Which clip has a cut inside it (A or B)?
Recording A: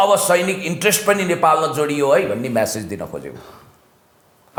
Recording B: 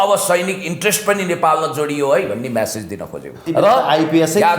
B